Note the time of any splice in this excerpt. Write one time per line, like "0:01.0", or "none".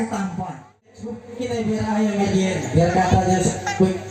0:00.9